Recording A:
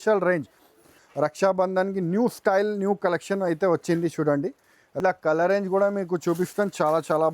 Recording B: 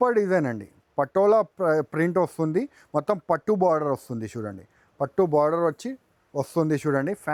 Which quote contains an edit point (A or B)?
A